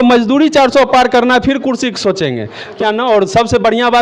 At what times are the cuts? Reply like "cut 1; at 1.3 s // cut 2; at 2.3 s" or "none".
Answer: cut 1; at 2.7 s